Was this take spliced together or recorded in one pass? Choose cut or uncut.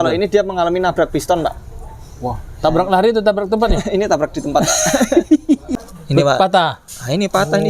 cut